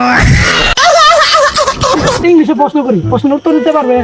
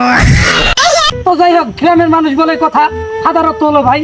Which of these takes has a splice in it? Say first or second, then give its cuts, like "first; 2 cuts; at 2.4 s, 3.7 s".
first; 2 cuts; at 0.9 s, 2.2 s